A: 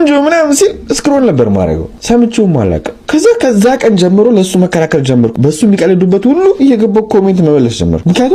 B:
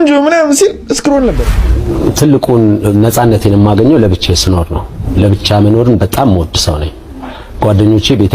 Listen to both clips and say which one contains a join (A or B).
B